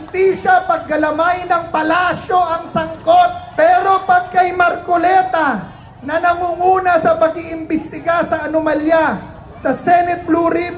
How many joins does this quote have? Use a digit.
1